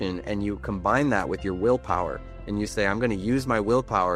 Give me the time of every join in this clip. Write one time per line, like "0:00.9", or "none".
none